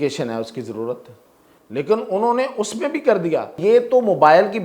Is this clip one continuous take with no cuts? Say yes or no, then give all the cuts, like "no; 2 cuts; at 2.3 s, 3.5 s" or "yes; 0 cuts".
no; 1 cut; at 3.6 s